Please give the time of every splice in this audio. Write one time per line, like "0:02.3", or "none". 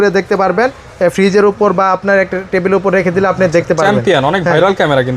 none